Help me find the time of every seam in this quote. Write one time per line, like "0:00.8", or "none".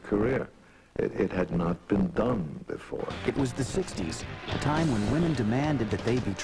0:04.1